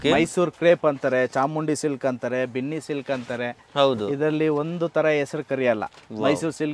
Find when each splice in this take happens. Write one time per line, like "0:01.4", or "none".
none